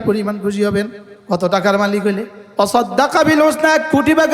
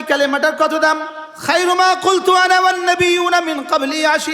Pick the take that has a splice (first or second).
first